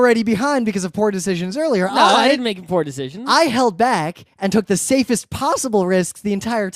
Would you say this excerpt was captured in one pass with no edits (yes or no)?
no